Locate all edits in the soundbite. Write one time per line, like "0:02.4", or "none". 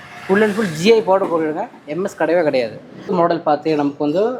0:03.0